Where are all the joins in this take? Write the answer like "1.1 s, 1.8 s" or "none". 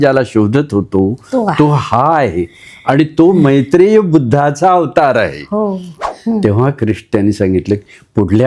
5.9 s